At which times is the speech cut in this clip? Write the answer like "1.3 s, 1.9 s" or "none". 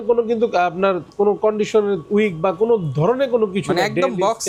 none